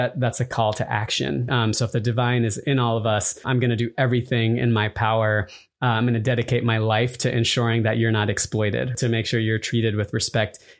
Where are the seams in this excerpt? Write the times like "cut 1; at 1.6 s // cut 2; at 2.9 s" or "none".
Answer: cut 1; at 1.5 s // cut 2; at 3.5 s // cut 3; at 8.9 s

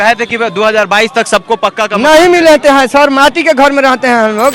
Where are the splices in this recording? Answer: none

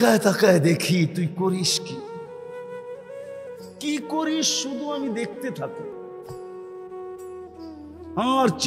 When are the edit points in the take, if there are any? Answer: cut 1; at 1.7 s // cut 2; at 3.3 s

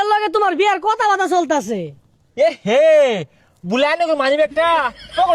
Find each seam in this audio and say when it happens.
none

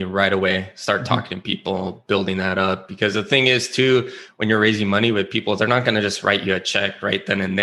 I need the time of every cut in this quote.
none

